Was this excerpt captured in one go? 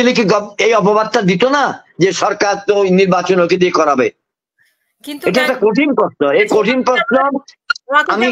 yes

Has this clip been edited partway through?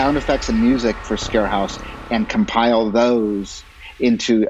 yes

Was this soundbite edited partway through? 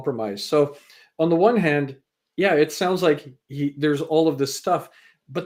no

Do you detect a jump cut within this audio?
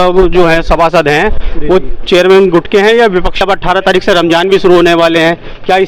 yes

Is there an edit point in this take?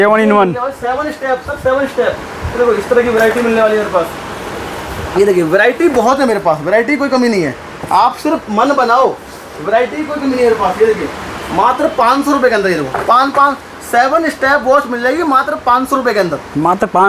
no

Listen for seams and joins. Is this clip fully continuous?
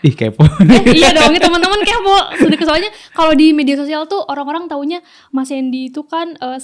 yes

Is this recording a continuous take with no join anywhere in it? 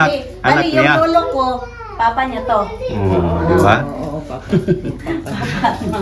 yes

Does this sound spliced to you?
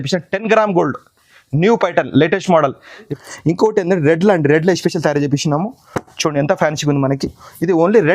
yes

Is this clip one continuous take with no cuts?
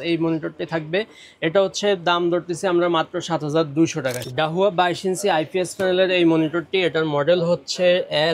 no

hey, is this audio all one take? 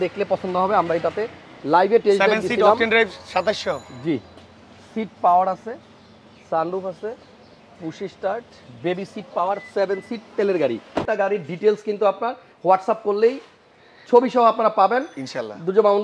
no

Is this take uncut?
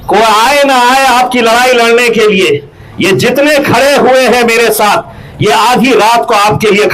yes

